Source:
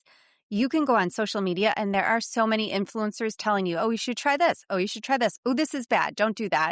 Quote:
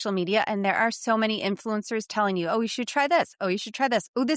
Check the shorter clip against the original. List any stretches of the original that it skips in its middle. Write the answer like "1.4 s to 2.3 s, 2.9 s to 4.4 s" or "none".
none